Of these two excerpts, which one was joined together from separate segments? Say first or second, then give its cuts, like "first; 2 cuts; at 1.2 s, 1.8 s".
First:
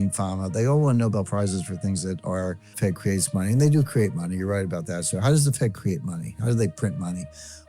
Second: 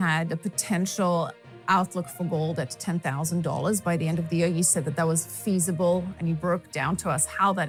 first; 1 cut; at 2.8 s